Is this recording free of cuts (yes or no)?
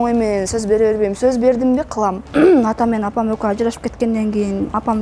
no